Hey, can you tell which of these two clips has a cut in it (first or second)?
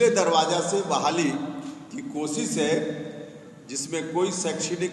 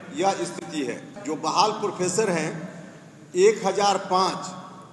second